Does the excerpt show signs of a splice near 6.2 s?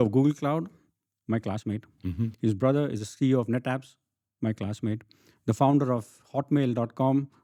no; 0 cuts

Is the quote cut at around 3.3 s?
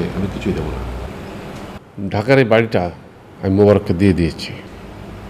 no; 1 cut; at 1.8 s

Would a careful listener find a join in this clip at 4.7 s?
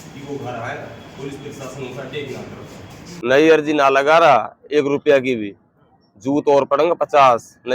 no; 1 cut; at 3.1 s

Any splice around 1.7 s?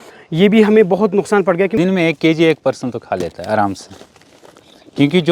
yes; 1 cut; at 1.7 s

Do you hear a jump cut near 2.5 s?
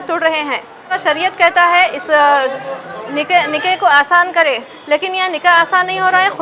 no; 1 cut; at 1.0 s

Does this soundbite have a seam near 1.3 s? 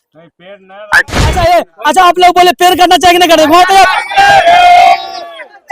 yes; 1 cut; at 1.3 s

